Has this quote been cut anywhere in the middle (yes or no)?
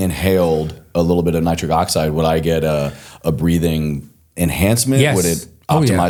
no